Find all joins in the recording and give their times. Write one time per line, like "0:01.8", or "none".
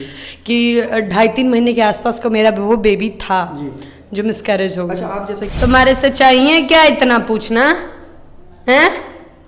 0:05.4